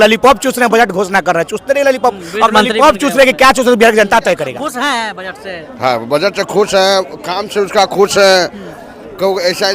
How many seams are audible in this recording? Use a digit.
1